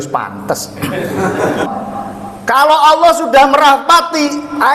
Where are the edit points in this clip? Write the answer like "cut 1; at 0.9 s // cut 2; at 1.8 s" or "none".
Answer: cut 1; at 1.7 s